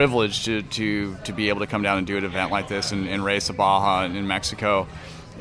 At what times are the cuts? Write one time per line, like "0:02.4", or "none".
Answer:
none